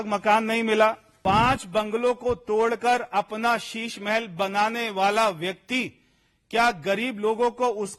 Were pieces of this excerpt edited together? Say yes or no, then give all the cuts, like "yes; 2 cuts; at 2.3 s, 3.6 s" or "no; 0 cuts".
yes; 1 cut; at 1.1 s